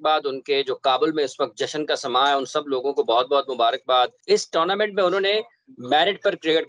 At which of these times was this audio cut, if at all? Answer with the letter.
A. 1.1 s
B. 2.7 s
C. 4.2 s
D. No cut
C